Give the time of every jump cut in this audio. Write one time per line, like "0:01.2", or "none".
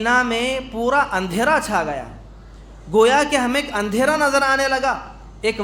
none